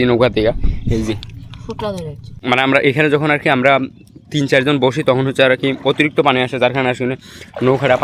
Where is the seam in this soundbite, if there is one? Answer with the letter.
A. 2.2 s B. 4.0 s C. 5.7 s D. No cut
A